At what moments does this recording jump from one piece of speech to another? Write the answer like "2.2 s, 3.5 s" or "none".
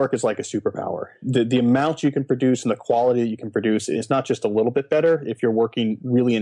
1.2 s